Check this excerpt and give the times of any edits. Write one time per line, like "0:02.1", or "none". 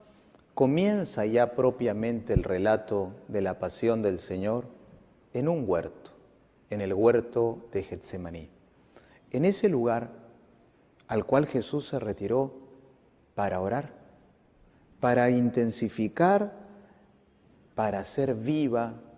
0:11.1